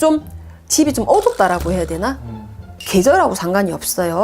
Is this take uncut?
no; 1 cut; at 2.7 s

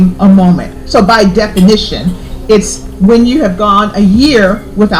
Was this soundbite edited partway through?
no; 0 cuts

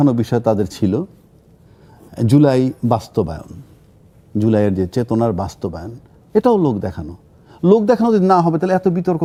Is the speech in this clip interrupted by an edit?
no; 0 cuts

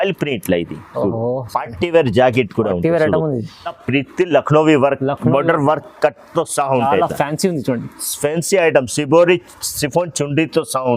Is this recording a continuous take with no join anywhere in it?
no; 1 cut; at 3.8 s

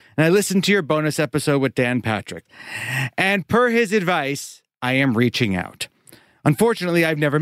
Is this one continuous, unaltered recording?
no; 1 cut; at 2.7 s

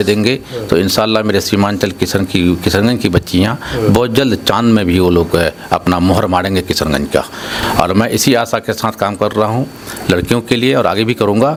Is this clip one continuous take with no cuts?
yes; 0 cuts

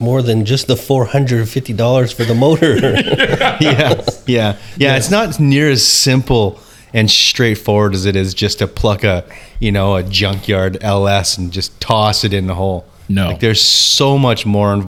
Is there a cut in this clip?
no; 0 cuts

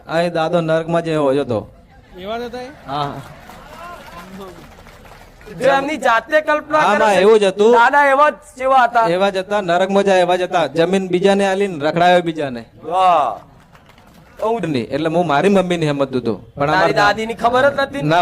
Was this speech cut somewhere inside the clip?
yes; 1 cut; at 14.6 s

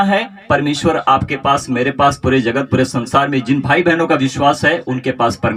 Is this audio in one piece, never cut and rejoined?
yes; 0 cuts

